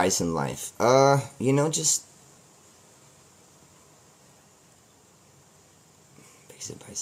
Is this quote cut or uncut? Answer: uncut